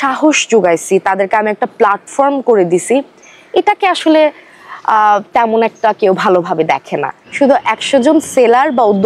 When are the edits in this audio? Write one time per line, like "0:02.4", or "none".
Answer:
0:07.2